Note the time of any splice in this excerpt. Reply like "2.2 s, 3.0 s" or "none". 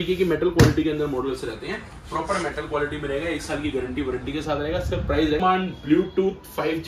5.4 s